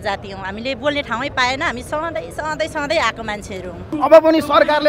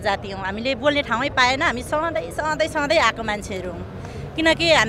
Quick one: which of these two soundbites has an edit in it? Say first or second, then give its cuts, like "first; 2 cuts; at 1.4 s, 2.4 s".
first; 1 cut; at 3.9 s